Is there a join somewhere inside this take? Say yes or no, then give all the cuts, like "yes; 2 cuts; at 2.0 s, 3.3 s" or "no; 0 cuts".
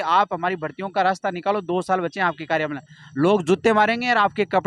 no; 0 cuts